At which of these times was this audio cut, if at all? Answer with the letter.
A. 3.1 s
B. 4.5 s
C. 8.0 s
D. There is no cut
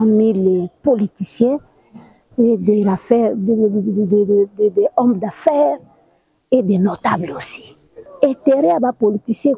C